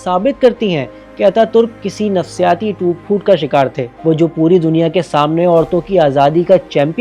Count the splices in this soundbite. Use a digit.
1